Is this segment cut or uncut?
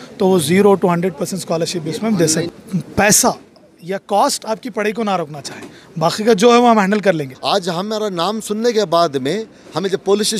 cut